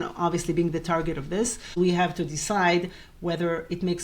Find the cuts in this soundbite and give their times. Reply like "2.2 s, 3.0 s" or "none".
1.7 s

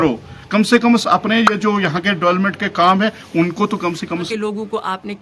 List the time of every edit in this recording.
4.3 s

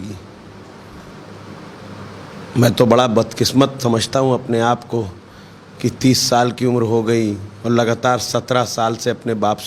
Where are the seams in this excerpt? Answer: none

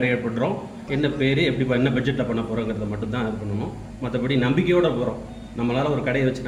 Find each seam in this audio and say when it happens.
none

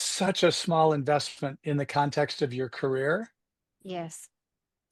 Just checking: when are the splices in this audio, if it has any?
none

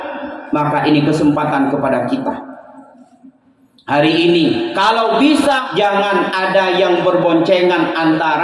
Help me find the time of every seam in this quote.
5.6 s

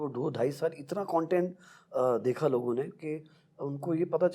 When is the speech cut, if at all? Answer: none

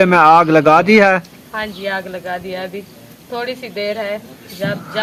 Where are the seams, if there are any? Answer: none

